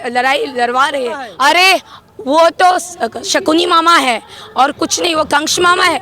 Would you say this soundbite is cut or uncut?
cut